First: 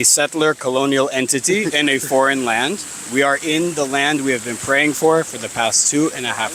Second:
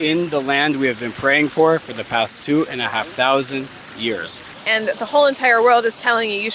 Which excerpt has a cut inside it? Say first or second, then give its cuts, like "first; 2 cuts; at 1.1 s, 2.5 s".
second; 1 cut; at 4.6 s